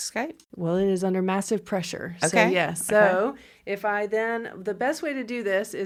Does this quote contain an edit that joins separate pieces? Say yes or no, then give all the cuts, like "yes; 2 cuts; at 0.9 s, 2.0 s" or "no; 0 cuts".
no; 0 cuts